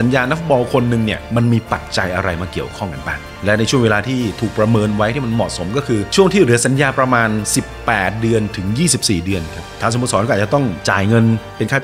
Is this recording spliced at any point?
yes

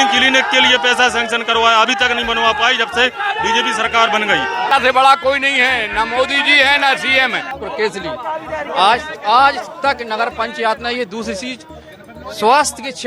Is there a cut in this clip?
yes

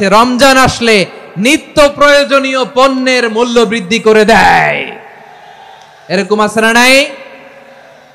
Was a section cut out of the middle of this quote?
no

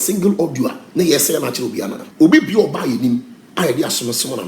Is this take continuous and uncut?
no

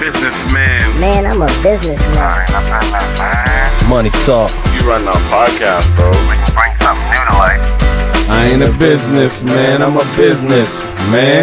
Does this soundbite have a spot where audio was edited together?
no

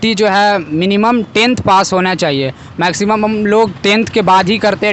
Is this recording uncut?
yes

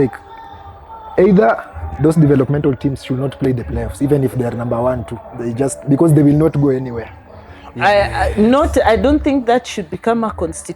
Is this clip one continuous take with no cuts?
yes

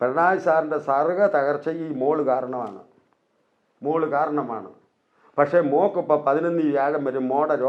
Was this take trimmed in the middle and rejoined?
no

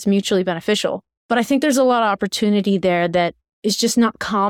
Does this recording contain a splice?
yes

